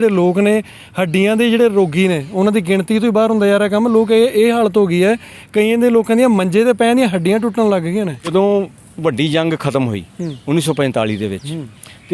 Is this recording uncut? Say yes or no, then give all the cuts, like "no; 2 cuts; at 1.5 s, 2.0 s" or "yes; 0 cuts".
no; 1 cut; at 8.3 s